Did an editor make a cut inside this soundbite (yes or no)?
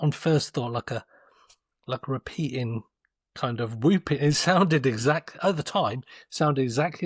no